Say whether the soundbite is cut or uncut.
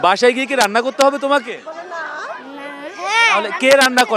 uncut